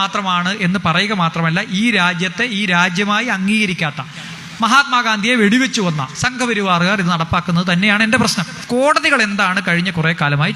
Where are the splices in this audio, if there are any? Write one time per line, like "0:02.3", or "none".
none

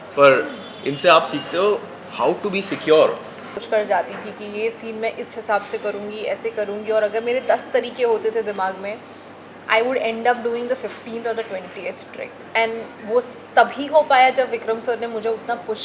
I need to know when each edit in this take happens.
0:03.6

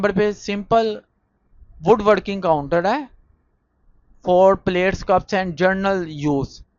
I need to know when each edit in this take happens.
none

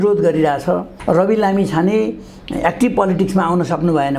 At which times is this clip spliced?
0:00.9

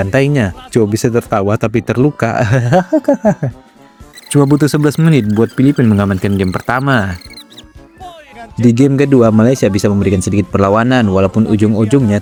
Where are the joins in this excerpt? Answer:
none

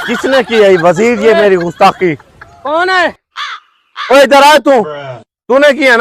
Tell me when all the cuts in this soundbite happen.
none

